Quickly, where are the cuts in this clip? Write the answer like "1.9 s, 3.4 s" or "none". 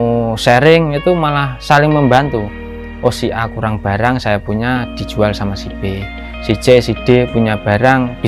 none